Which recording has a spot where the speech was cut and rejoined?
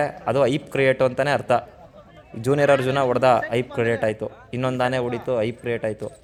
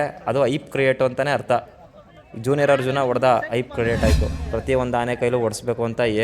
second; 1 cut; at 4.3 s

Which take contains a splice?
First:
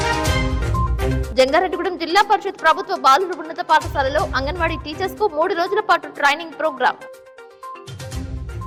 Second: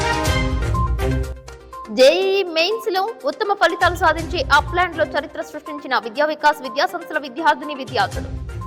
second; 1 cut; at 0.9 s

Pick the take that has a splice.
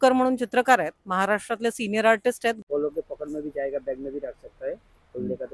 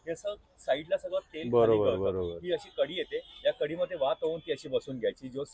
first; 1 cut; at 2.6 s

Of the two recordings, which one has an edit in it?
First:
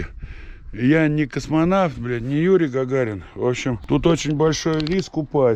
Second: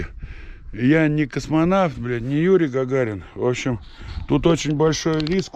first; 1 cut; at 3.8 s

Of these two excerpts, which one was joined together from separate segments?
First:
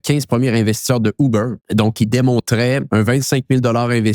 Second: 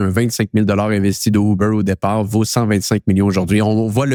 first; 2 cuts; at 1.6 s, 2.8 s

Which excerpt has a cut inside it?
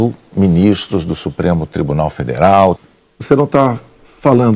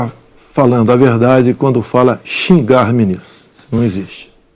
first; 1 cut; at 2.8 s

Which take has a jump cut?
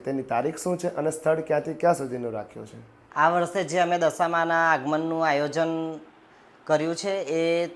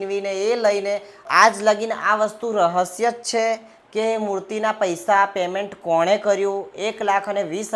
second; 1 cut; at 1.2 s

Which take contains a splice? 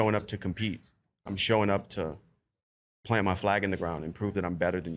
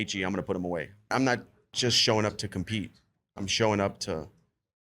second; 1 cut; at 1.1 s

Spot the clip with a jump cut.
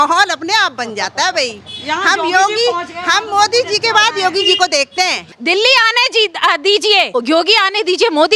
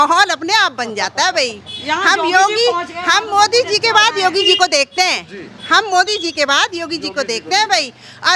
first; 2 cuts; at 5.3 s, 7.1 s

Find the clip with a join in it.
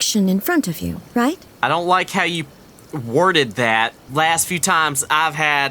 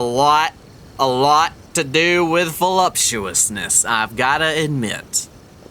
first; 2 cuts; at 1.5 s, 4.0 s

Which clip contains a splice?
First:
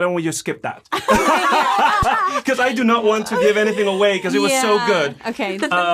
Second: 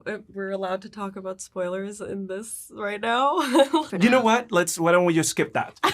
second; 1 cut; at 3.9 s

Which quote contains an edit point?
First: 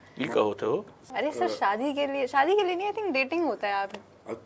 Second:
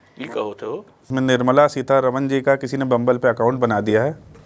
second; 1 cut; at 1.1 s

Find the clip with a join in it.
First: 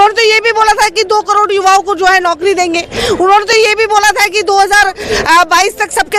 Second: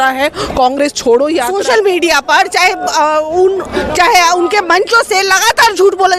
second; 1 cut; at 1.5 s

